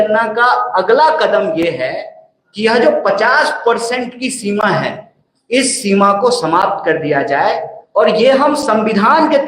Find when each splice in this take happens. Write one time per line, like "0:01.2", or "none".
none